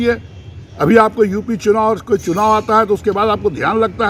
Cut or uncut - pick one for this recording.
uncut